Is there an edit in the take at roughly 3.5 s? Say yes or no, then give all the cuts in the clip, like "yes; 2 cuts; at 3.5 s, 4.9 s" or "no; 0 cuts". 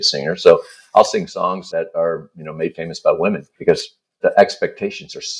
yes; 2 cuts; at 1.6 s, 3.5 s